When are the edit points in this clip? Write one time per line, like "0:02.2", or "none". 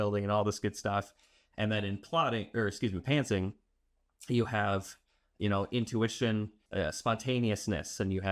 0:06.6